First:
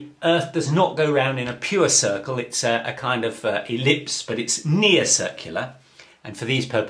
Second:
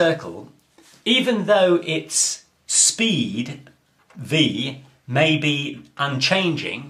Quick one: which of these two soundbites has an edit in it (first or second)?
first